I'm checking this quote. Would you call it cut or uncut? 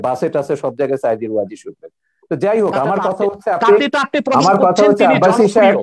uncut